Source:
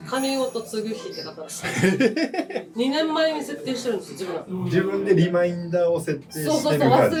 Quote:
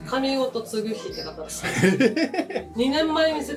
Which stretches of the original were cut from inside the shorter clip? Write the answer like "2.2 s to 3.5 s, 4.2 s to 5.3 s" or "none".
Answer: none